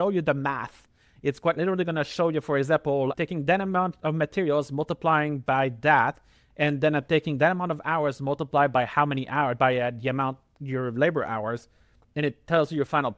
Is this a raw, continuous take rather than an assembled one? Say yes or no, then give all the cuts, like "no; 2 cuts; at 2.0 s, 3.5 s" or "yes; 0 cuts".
yes; 0 cuts